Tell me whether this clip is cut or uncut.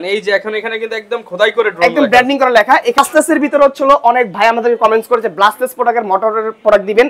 cut